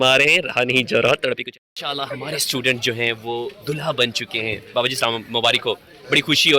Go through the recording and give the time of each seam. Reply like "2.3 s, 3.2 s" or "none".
1.4 s